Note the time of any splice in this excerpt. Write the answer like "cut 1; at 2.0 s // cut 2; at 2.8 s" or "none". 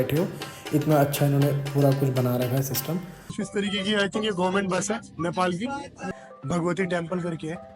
cut 1; at 3.3 s // cut 2; at 6.1 s